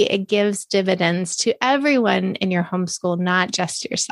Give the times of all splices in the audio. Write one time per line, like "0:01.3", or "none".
none